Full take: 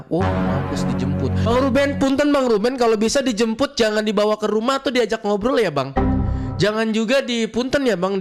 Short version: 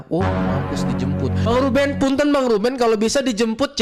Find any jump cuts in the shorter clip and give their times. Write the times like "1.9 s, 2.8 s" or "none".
none